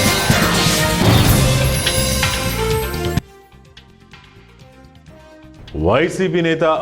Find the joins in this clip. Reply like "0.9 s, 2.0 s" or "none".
5.6 s